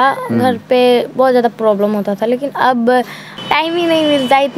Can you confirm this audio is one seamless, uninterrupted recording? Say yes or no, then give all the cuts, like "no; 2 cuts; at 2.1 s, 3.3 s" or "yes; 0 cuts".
no; 1 cut; at 3.2 s